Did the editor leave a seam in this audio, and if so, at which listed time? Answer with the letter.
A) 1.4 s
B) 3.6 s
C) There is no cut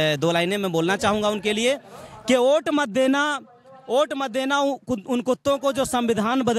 C